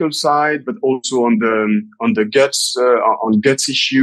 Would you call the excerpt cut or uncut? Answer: uncut